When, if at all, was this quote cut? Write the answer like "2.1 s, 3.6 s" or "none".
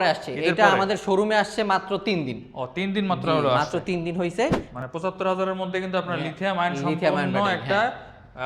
4.7 s